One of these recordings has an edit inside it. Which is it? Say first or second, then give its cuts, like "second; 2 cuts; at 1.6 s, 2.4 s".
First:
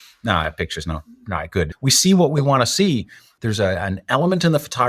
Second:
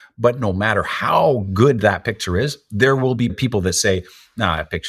first; 2 cuts; at 1.7 s, 3.3 s